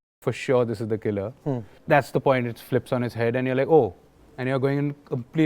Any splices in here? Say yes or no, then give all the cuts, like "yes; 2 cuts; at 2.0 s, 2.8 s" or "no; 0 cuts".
yes; 1 cut; at 1.7 s